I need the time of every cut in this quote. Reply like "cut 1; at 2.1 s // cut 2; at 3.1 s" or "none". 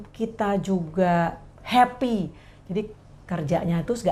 none

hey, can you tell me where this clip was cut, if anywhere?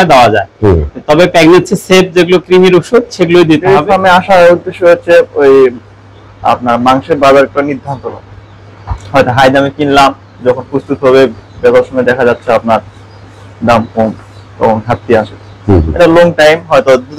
cut 1; at 3.6 s

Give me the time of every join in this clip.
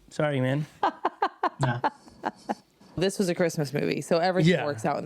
cut 1; at 3.0 s

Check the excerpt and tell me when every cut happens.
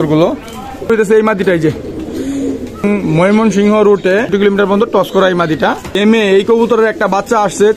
cut 1; at 0.9 s // cut 2; at 2.8 s // cut 3; at 5.9 s

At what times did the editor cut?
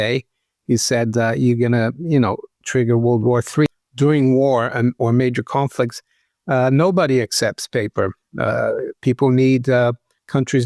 cut 1; at 3.7 s

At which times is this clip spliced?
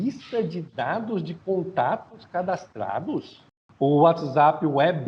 cut 1; at 3.4 s

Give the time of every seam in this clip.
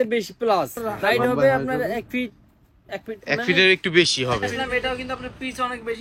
cut 1; at 0.9 s // cut 2; at 4.6 s

